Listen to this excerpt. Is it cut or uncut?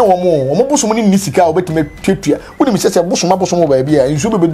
uncut